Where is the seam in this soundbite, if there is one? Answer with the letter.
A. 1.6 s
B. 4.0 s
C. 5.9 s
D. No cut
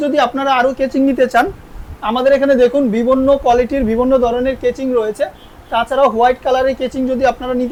D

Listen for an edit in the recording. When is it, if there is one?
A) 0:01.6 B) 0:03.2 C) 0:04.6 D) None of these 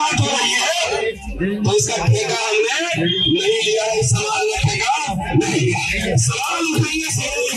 D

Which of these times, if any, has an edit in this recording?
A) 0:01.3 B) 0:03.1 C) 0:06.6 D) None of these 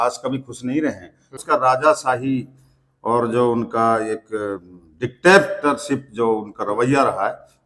A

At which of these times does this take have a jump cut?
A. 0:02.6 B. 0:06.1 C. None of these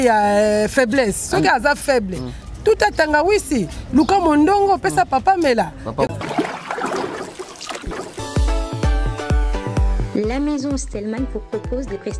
B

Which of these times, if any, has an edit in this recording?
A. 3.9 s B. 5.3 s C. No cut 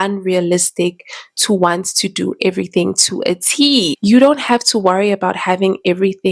A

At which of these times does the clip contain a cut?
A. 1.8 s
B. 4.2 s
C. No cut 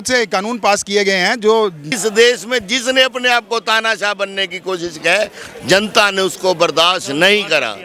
A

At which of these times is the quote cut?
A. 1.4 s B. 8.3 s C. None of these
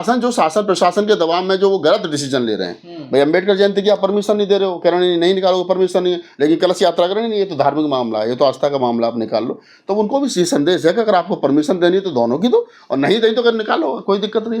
C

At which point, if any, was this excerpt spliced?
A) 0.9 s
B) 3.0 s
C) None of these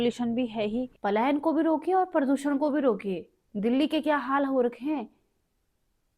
A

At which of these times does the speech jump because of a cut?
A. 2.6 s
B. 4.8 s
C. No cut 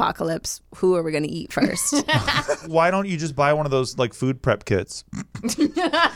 A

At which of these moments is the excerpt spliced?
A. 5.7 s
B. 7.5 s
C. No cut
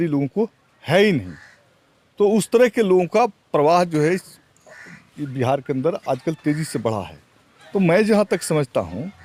C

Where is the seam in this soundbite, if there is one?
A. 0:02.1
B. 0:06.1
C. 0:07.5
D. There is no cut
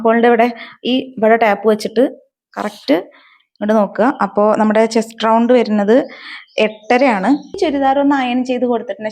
C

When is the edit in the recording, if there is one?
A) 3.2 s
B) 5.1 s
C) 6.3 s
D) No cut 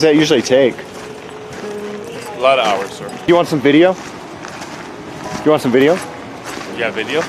A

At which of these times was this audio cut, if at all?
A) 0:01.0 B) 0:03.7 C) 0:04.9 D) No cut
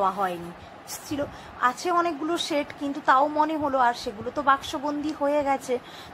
A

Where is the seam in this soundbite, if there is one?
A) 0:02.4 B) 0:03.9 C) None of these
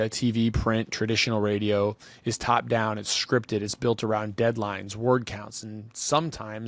C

